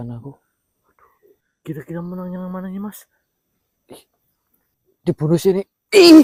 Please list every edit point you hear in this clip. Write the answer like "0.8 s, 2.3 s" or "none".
none

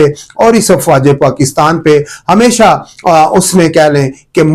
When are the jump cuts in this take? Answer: none

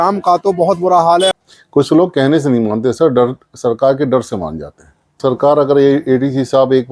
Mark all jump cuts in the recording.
1.3 s, 4.9 s

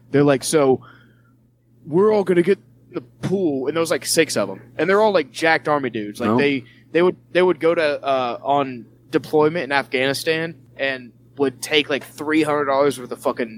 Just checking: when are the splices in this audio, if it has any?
8.9 s, 10.6 s

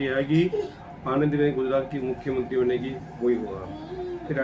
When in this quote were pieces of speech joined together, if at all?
none

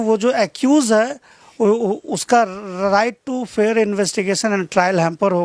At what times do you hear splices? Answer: none

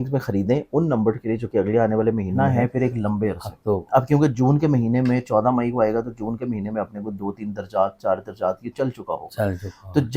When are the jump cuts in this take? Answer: 2.3 s

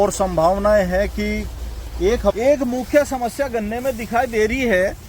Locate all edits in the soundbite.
2.4 s

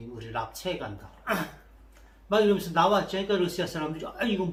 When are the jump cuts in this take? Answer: none

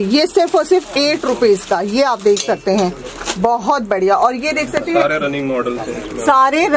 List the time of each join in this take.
none

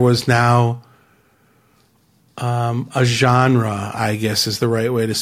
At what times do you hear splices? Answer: none

